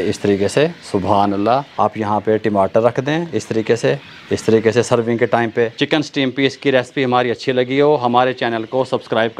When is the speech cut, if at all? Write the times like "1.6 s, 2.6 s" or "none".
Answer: 1.7 s, 4.1 s, 5.8 s